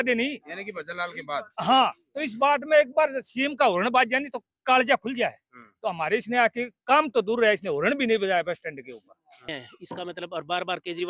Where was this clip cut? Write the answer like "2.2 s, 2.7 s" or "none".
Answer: 9.5 s